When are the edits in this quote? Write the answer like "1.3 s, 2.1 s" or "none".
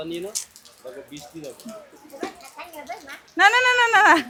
none